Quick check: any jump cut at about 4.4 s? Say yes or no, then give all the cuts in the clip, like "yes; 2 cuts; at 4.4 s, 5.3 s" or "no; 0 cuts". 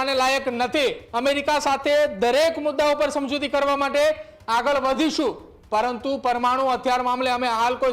no; 1 cut; at 1.1 s